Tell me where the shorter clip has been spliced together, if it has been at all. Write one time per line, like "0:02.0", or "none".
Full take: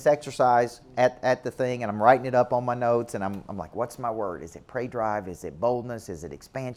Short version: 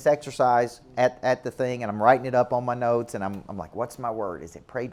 none